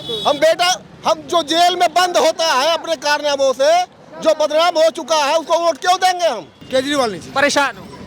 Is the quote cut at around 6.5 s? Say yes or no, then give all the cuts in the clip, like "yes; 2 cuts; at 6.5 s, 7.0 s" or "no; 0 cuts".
yes; 1 cut; at 6.5 s